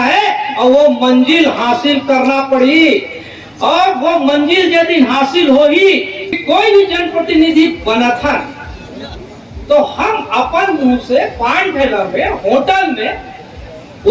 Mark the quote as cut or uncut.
cut